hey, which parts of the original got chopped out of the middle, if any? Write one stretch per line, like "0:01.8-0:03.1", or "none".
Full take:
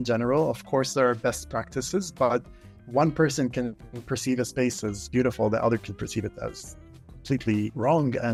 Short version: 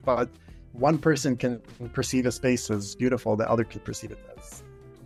none

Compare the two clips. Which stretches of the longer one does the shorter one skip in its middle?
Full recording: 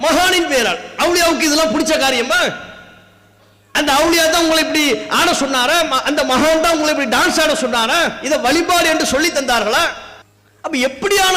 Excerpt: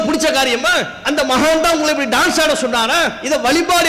0:02.7-0:06.0

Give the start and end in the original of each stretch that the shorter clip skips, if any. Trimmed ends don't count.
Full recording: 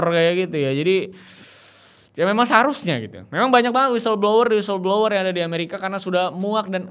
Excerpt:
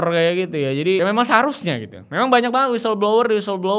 0:01.0-0:02.2

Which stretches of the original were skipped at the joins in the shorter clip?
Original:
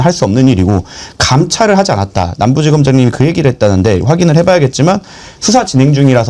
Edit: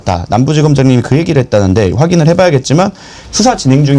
none

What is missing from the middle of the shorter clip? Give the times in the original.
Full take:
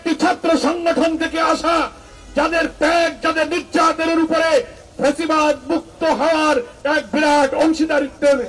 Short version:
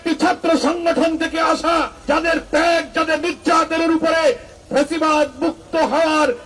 0:01.9-0:02.2

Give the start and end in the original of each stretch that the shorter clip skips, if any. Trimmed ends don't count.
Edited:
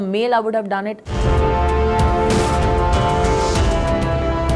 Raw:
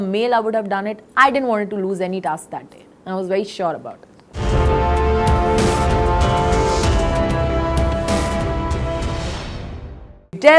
0:01.0-0:04.3

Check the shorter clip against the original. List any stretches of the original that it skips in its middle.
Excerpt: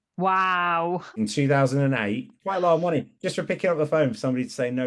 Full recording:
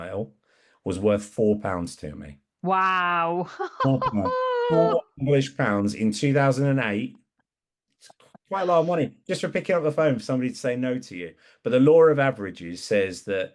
0:03.6-0:06.0
0:07.2-0:08.4

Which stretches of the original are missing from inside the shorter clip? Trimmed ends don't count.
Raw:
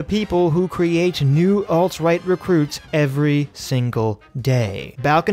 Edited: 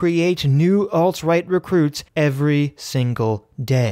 none

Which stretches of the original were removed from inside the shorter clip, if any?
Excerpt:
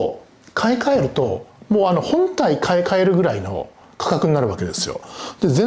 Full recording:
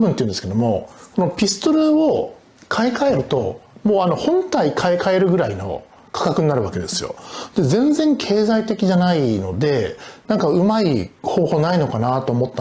none

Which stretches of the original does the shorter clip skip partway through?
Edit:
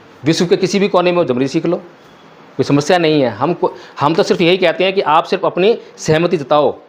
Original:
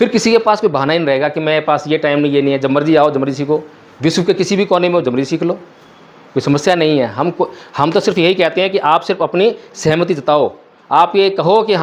none

